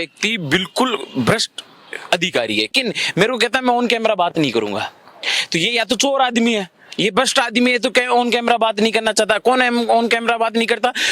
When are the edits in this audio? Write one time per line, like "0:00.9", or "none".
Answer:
0:02.7